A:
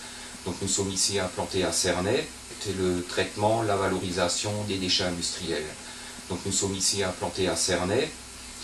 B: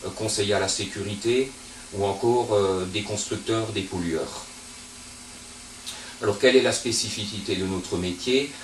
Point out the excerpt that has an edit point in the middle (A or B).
A